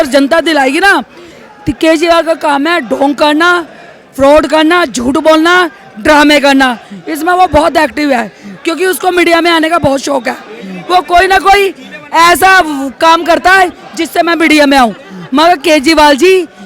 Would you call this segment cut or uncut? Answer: uncut